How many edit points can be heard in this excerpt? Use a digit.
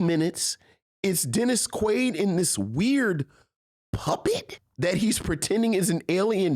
1